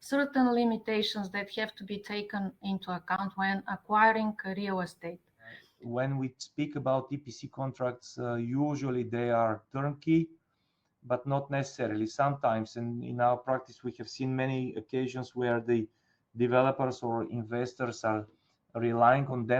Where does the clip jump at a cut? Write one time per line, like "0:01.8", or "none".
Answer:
0:05.7